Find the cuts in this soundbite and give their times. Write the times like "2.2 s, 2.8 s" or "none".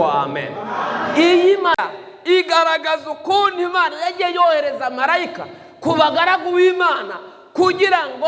1.8 s